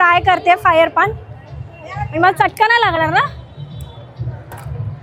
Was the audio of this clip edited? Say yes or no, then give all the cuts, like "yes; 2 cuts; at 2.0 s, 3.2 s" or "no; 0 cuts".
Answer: no; 0 cuts